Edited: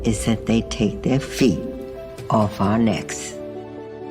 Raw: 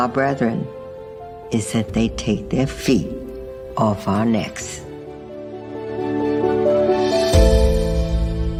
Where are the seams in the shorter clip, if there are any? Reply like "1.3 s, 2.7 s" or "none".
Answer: 3.1 s